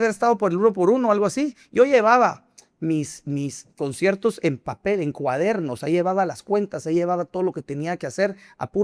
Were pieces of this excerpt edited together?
no; 0 cuts

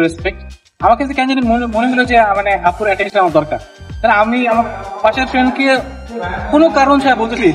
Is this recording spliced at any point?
no; 0 cuts

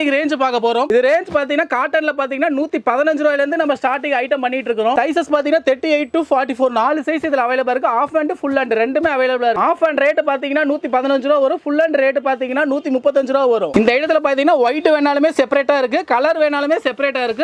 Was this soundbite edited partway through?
no; 0 cuts

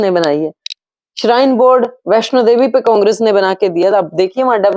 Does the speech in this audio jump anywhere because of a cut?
no; 0 cuts

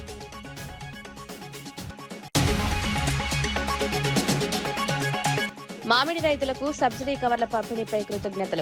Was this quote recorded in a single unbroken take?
yes; 0 cuts

